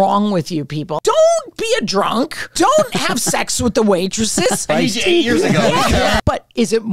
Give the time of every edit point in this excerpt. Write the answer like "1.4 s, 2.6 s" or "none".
1.0 s, 2.4 s, 4.7 s, 6.2 s